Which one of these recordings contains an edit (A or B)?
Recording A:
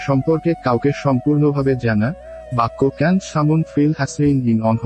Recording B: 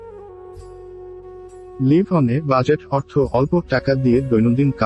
B